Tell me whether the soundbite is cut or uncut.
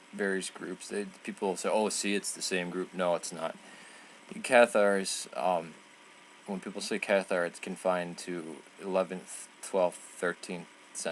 cut